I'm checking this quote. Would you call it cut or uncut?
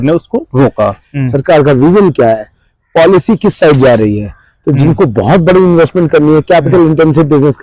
cut